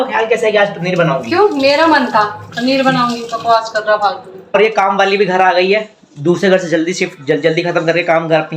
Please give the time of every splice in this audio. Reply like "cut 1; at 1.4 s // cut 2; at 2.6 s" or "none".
cut 1; at 4.6 s